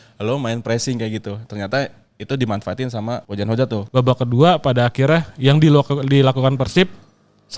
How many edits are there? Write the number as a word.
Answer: one